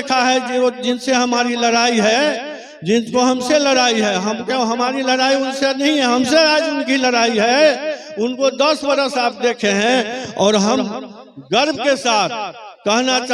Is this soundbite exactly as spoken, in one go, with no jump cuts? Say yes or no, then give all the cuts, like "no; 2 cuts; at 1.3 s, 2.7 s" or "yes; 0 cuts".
yes; 0 cuts